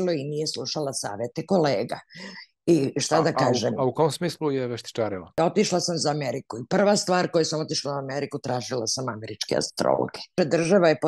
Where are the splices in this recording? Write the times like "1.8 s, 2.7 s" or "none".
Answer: 5.3 s, 10.4 s

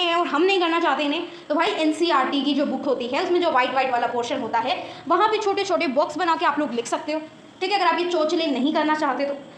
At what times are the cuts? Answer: none

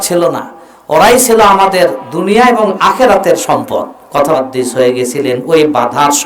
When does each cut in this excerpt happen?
4.4 s

